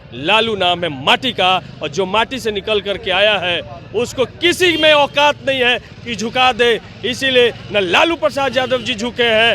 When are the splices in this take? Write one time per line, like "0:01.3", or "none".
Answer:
none